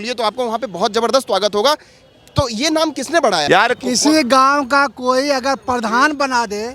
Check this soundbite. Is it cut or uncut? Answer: cut